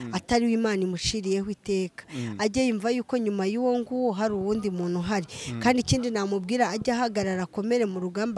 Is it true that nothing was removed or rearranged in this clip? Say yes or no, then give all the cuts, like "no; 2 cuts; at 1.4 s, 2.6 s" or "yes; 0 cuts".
yes; 0 cuts